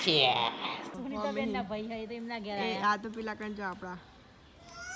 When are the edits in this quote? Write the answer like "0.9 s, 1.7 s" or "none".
0.9 s